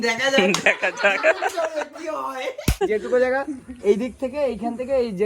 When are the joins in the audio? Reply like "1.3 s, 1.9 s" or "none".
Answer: 2.8 s